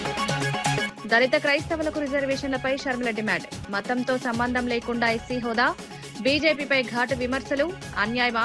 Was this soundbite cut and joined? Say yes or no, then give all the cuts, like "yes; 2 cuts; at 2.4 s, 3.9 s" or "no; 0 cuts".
yes; 1 cut; at 0.9 s